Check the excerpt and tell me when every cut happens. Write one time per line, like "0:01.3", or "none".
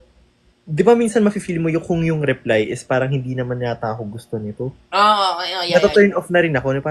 none